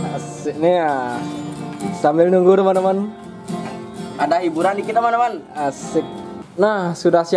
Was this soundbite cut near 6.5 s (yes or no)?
yes